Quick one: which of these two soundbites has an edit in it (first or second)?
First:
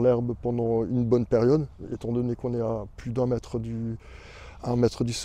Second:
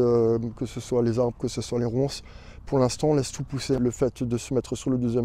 second